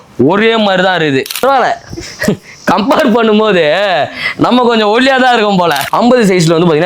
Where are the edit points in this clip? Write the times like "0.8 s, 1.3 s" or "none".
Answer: 1.4 s, 5.8 s